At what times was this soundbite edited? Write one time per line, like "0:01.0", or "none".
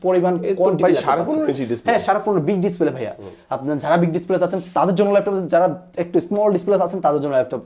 none